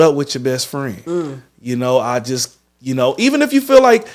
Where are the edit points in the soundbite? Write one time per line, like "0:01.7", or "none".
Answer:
none